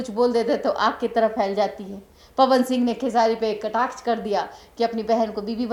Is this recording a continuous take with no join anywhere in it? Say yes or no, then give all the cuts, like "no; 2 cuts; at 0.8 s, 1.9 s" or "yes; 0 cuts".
yes; 0 cuts